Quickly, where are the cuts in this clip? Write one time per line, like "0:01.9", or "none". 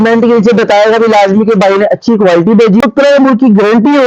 0:02.8